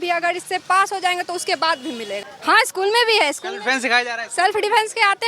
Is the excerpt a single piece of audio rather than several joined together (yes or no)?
no